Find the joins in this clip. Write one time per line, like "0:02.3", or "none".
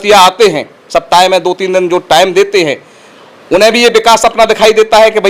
none